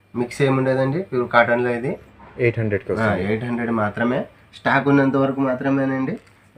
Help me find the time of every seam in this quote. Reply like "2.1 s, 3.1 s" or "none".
none